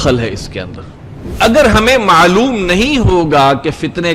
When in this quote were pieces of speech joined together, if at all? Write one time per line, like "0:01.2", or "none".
0:01.4